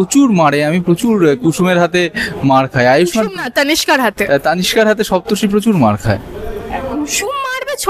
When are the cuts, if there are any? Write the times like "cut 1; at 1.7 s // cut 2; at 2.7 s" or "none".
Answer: none